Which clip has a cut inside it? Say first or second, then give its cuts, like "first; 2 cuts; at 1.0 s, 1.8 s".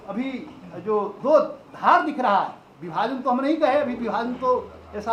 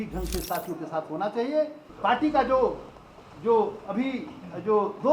second; 1 cut; at 1.8 s